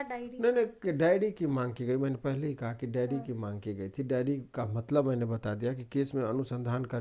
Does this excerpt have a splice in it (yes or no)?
no